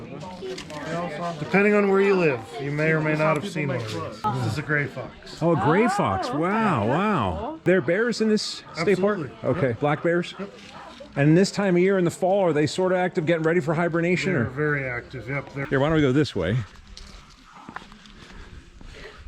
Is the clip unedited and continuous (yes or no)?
no